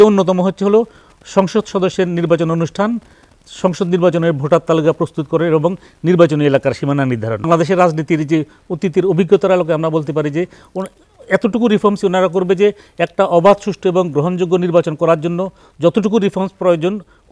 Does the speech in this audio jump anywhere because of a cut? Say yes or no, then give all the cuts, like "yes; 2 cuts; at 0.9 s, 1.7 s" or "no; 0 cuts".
yes; 1 cut; at 7.4 s